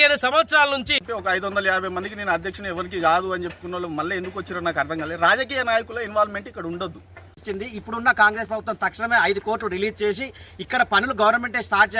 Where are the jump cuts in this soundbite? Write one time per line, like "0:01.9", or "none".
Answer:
0:01.0
0:07.4